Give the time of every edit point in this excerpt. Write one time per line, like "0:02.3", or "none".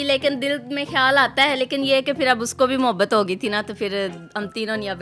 none